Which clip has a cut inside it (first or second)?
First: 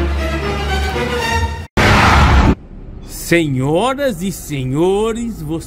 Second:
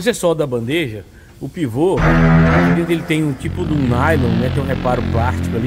first